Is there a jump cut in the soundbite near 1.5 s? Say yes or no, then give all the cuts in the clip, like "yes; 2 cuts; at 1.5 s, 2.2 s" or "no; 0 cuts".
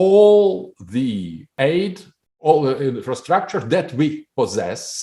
yes; 1 cut; at 1.5 s